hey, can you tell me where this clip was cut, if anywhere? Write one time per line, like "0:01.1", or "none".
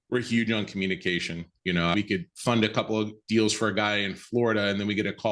0:01.9